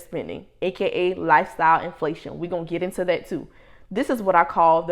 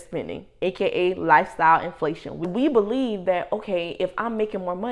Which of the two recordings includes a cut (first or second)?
second